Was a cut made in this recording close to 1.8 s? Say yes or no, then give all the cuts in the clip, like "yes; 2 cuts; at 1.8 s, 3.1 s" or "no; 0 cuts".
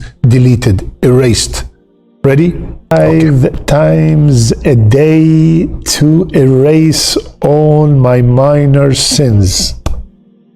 no; 1 cut; at 3.2 s